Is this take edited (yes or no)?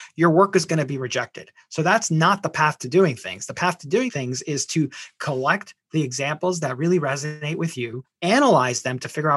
yes